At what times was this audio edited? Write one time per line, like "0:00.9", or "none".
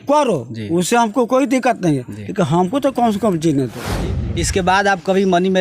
0:04.0